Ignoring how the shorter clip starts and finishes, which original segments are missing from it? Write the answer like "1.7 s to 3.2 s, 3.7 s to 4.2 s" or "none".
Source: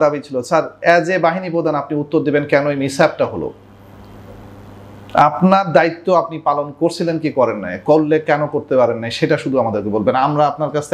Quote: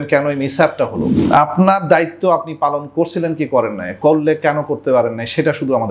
3.5 s to 5.0 s